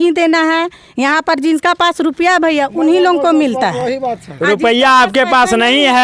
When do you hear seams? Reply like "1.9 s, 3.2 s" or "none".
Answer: none